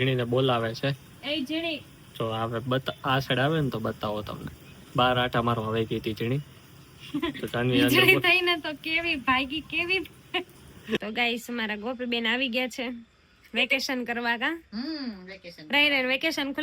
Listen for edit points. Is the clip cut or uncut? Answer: cut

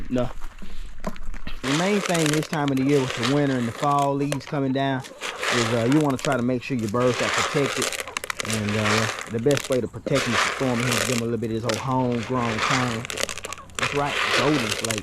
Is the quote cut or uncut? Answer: cut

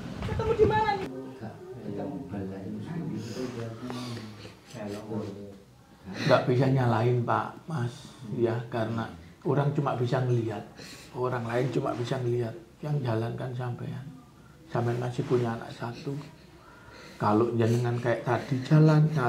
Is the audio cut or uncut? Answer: cut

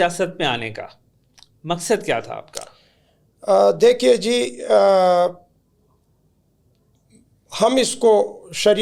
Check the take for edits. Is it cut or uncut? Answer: uncut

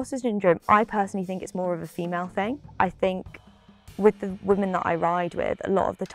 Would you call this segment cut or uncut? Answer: uncut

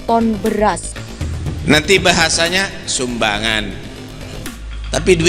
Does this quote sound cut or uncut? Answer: cut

